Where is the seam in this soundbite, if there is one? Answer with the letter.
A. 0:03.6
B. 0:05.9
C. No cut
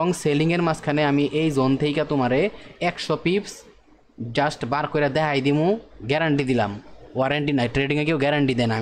C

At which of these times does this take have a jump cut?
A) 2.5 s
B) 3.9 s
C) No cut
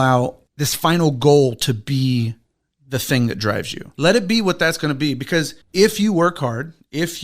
B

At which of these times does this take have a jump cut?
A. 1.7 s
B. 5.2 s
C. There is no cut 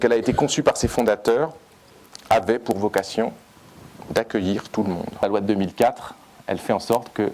B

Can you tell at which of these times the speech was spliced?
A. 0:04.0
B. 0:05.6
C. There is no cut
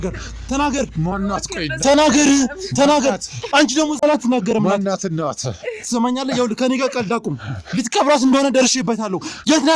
A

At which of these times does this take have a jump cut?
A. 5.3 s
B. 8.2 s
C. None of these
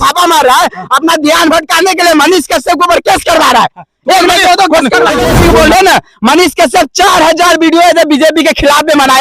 A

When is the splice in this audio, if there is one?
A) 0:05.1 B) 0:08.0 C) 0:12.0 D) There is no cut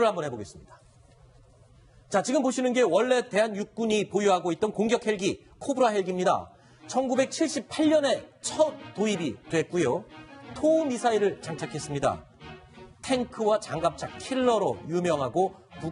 B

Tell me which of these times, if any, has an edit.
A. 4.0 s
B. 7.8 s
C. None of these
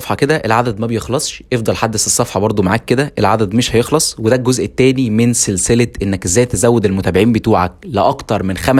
C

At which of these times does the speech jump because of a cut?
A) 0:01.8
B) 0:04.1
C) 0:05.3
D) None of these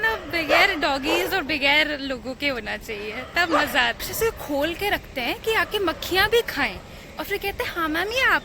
B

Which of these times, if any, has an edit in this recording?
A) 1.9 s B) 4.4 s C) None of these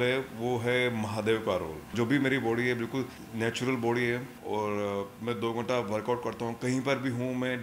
A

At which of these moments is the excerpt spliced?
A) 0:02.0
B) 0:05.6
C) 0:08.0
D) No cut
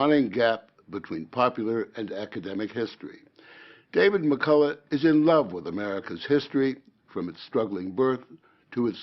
C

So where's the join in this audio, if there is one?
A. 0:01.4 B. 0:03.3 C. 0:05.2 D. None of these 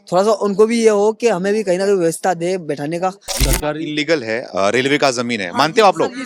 B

